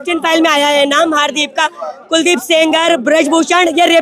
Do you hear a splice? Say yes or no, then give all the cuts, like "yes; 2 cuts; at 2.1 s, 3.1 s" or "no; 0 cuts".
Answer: no; 0 cuts